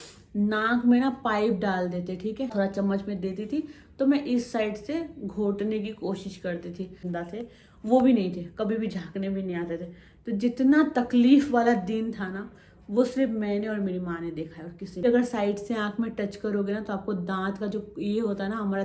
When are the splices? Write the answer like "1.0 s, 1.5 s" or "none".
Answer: 2.5 s, 7.0 s, 15.0 s